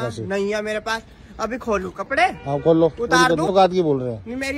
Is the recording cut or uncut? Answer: cut